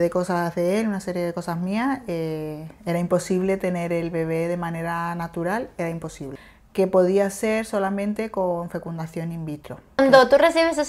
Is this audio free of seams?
no; 2 cuts; at 6.3 s, 10.0 s

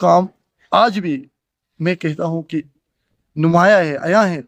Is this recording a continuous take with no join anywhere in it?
yes; 0 cuts

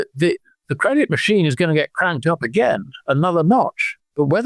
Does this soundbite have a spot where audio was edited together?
no; 0 cuts

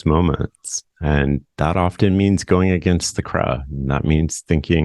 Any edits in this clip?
no; 0 cuts

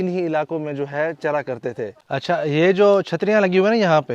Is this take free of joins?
no; 1 cut; at 2.0 s

